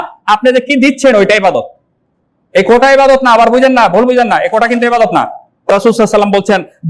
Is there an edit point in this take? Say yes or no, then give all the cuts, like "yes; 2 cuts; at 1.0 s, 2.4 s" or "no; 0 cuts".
yes; 1 cut; at 5.7 s